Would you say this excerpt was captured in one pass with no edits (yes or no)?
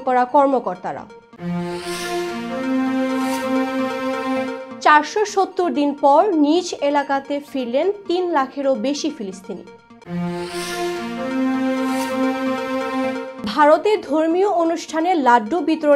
yes